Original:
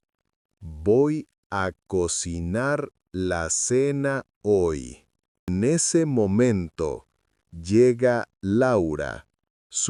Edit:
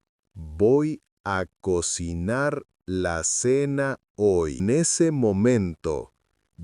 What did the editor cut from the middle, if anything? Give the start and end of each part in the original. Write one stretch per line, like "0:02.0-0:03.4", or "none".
0:04.8-0:05.5